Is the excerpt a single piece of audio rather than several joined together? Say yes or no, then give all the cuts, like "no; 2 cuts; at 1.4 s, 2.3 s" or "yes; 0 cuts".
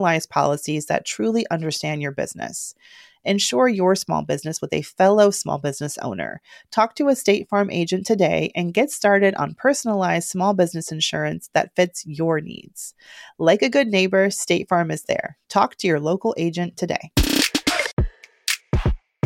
no; 1 cut; at 17.9 s